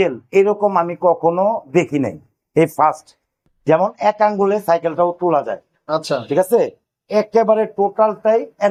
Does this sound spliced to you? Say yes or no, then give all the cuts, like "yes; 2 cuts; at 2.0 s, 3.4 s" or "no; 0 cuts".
no; 0 cuts